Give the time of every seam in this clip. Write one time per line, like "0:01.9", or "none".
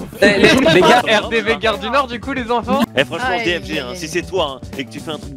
0:01.0
0:02.9

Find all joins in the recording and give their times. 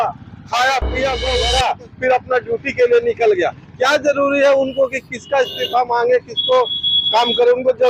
0:01.2

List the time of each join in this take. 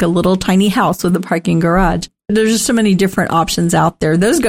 none

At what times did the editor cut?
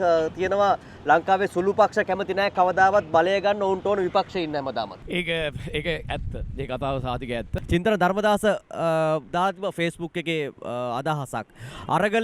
0:05.0
0:07.6

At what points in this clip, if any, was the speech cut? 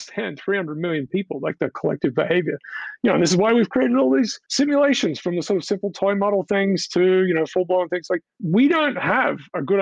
none

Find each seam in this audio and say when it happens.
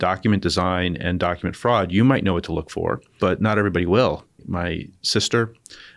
0:03.1
0:04.4

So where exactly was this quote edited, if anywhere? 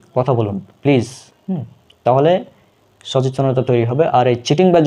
none

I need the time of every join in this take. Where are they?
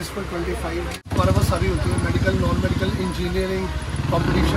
0:01.0

